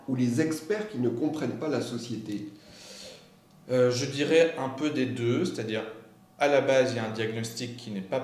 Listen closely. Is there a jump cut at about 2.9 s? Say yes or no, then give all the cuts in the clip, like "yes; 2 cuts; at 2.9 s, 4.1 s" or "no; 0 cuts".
no; 0 cuts